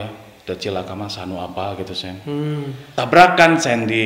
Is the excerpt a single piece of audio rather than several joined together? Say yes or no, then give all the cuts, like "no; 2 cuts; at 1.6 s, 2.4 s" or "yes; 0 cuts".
no; 1 cut; at 2.8 s